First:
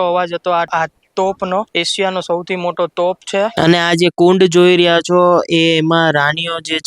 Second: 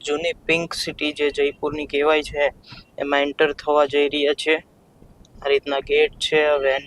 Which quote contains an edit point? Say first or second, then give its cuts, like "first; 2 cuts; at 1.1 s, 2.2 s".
first; 1 cut; at 3.5 s